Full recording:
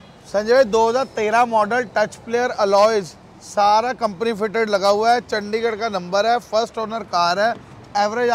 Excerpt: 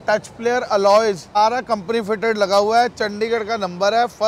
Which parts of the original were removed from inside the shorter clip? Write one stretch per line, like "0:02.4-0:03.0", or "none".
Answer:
0:03.2-0:03.7

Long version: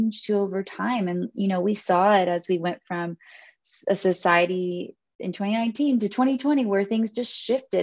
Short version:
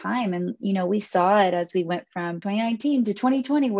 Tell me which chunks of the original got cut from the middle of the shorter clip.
0:03.1-0:05.3

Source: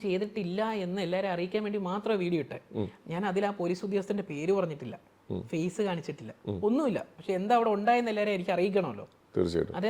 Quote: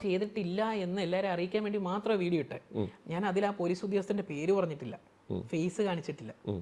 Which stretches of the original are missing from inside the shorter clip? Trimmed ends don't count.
none

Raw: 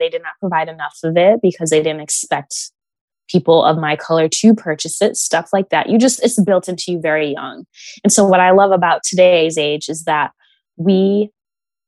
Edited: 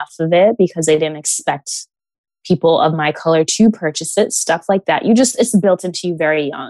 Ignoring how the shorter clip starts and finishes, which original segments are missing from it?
none

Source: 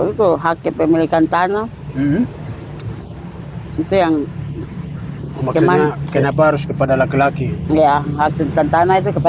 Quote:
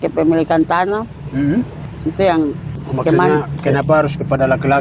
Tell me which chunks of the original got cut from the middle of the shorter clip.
0:02.5-0:03.6
0:04.4-0:05.2

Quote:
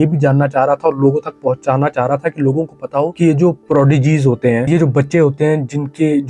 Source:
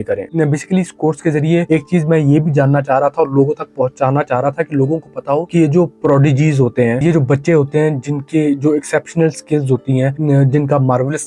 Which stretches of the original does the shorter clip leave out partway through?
none

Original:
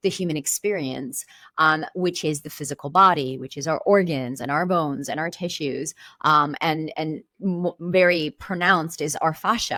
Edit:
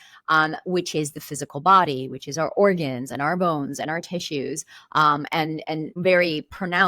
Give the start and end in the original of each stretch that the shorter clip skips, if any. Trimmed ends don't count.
0:07.2-0:07.8

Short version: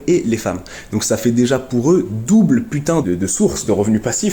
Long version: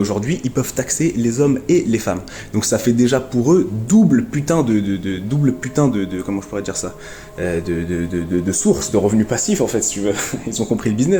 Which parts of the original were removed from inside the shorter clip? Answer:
0:04.6-0:08.3

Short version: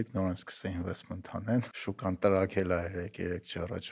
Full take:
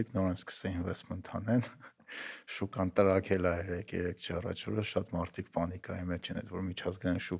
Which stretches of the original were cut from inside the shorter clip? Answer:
0:01.7-0:02.5

